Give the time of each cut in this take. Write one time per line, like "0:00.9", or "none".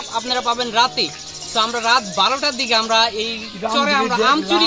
none

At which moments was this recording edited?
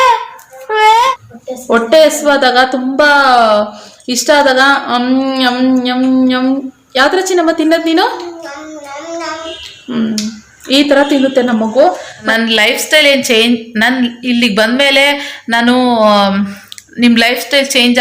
0:01.1
0:12.2

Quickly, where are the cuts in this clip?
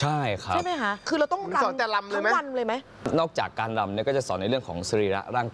0:01.0
0:02.9

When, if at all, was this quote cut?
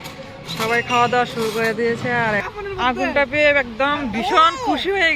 0:02.5

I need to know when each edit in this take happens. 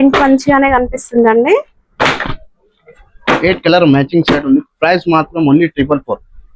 none

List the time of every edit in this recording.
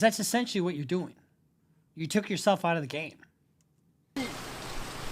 none

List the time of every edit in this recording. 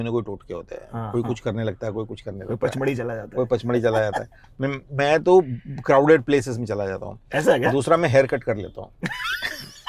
none

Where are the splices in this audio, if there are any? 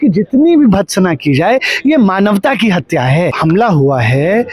0:03.4

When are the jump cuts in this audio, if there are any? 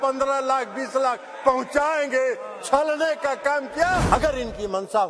0:04.1

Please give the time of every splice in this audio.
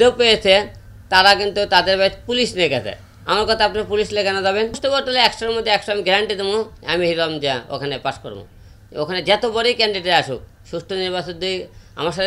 0:04.8

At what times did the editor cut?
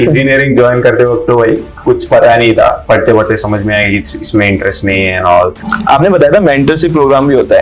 0:02.8
0:05.6

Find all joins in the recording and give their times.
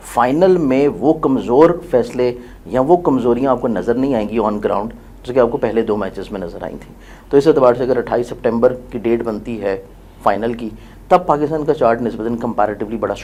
none

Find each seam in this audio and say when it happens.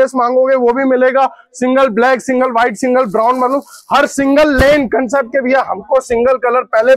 none

